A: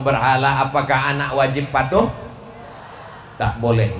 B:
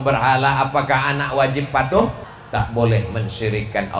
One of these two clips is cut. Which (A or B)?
B